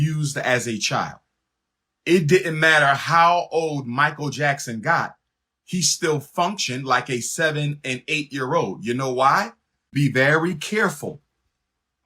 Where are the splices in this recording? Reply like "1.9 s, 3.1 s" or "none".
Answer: 9.9 s